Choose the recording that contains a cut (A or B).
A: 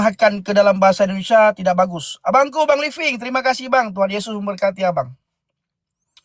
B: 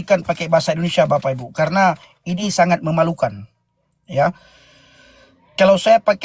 B